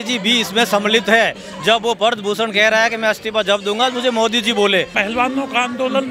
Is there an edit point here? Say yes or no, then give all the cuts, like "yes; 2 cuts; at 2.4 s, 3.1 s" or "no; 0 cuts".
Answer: yes; 1 cut; at 4.9 s